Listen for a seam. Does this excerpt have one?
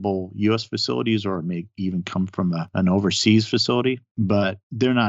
yes; 2 cuts; at 2.7 s, 4.1 s

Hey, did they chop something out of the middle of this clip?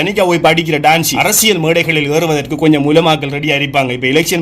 yes; 1 cut; at 1.1 s

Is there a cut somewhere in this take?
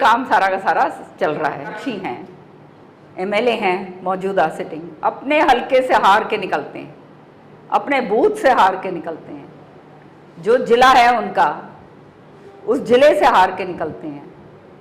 yes; 1 cut; at 1.8 s

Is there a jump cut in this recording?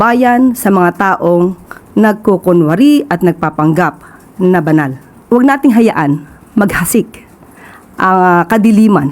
yes; 1 cut; at 5.1 s

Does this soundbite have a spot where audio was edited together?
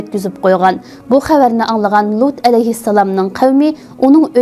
no; 0 cuts

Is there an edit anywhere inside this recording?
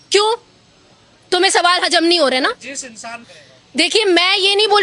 no; 0 cuts

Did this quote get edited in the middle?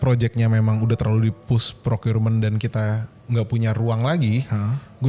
no; 0 cuts

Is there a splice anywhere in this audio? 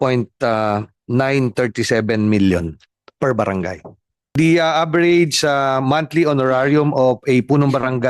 yes; 1 cut; at 4.2 s

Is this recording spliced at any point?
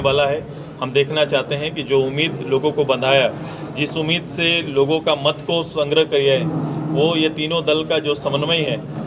no; 0 cuts

